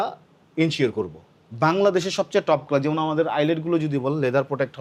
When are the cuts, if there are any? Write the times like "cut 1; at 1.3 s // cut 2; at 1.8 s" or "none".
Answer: none